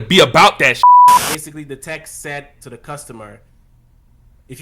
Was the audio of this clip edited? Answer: yes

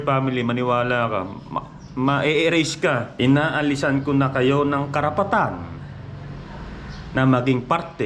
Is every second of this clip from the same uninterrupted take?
no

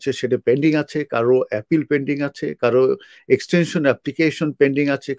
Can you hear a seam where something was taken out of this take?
no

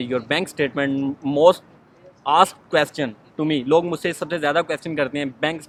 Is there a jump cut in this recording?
no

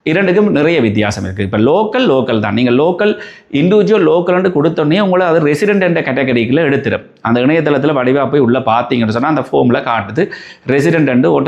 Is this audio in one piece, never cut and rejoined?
yes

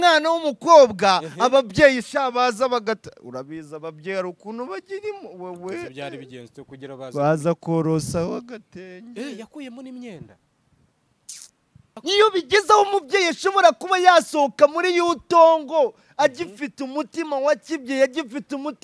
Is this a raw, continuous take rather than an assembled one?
no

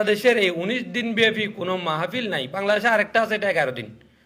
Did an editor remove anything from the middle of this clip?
no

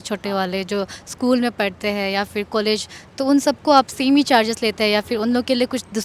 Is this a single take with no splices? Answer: yes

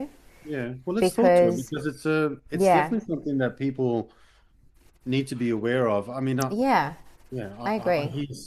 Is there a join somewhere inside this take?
no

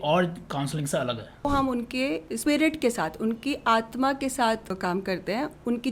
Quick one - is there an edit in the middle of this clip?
yes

